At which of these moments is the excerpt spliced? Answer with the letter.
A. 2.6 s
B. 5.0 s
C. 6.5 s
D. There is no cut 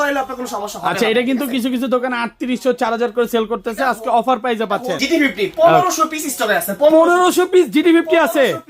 B